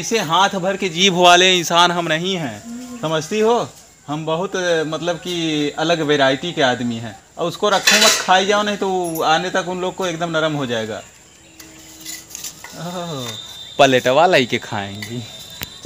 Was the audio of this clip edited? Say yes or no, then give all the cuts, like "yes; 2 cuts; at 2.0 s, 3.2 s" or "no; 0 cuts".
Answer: no; 0 cuts